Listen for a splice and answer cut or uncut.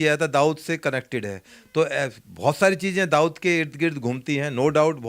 uncut